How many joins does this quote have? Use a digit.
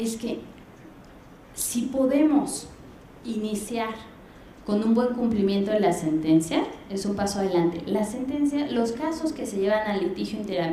1